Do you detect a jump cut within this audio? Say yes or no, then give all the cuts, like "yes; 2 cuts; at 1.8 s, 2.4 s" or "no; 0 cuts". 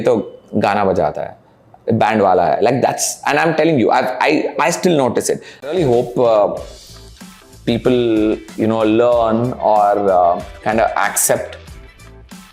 yes; 1 cut; at 5.7 s